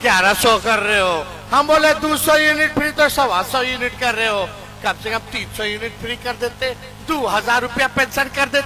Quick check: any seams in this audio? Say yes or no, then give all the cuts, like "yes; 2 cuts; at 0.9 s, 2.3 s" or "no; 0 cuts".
no; 0 cuts